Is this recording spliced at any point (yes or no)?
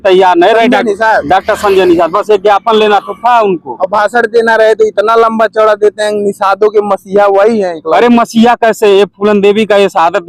no